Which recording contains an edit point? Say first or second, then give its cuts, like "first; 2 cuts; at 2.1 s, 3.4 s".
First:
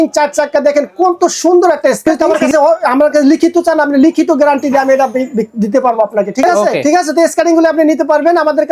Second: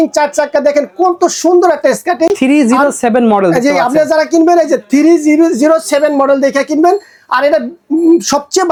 first; 2 cuts; at 2.0 s, 6.8 s